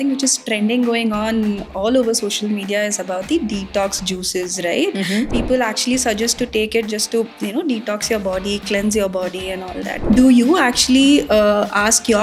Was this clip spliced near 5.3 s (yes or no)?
yes